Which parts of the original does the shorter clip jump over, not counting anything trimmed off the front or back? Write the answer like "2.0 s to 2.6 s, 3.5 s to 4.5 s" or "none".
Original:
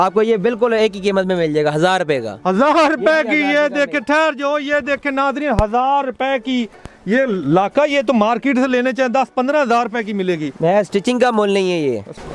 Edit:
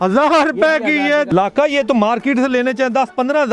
3.7 s to 7.5 s